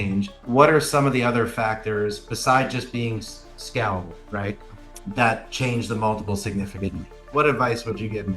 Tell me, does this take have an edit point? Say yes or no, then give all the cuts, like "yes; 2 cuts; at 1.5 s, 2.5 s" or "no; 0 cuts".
yes; 1 cut; at 7.2 s